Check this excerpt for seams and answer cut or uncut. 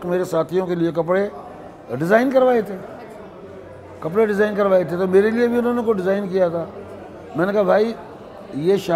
uncut